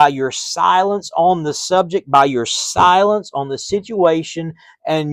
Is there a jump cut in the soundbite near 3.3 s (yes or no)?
no